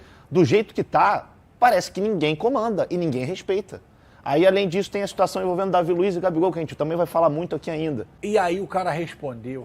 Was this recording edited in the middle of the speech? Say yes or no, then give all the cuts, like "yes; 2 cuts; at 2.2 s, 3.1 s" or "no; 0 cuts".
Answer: yes; 1 cut; at 8.1 s